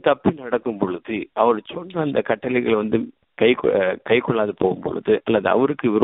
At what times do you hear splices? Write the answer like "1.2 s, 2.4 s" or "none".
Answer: 3.2 s